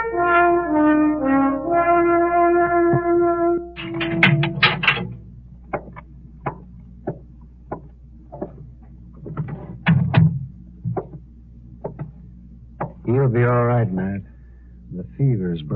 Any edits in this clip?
yes; 1 cut; at 13.7 s

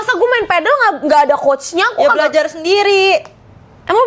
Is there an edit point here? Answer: no; 0 cuts

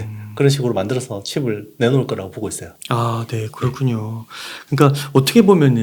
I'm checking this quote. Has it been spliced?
no; 0 cuts

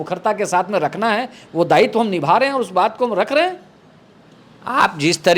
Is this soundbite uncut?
yes; 0 cuts

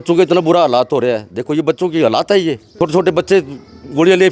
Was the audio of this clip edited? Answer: yes; 1 cut; at 2.8 s

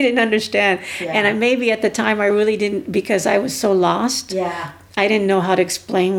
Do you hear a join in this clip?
no; 0 cuts

